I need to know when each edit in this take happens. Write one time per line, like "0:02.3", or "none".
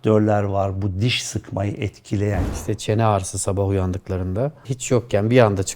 0:02.4